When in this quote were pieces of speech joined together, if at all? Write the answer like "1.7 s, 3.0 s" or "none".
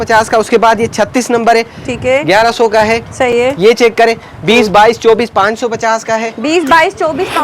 none